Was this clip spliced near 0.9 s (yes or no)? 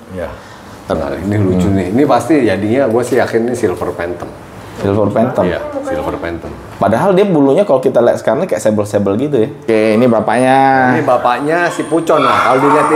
yes